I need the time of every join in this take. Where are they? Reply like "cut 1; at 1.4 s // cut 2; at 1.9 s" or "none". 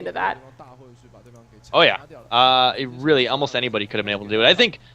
cut 1; at 2.6 s

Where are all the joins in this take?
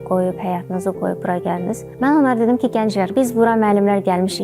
cut 1; at 1.9 s // cut 2; at 3.1 s

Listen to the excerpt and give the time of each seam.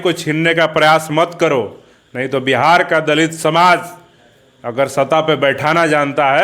none

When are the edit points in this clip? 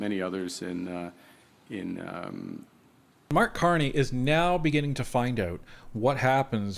cut 1; at 3.3 s

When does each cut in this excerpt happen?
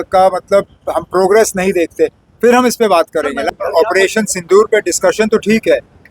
cut 1; at 3.5 s

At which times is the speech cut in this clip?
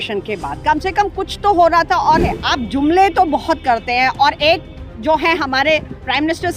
cut 1; at 2.4 s

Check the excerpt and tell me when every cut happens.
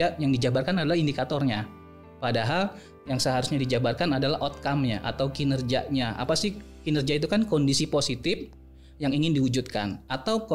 none

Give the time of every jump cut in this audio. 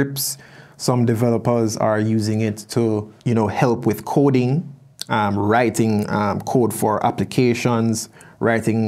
cut 1; at 3.1 s

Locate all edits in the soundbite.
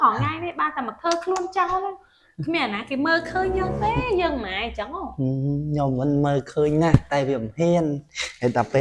none

